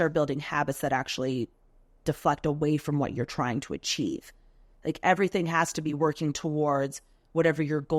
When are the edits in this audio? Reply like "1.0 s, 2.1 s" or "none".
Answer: none